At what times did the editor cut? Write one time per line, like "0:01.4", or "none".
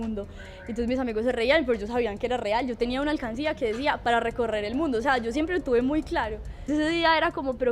0:06.7